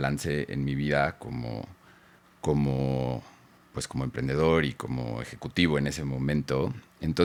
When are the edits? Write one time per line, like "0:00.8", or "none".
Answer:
none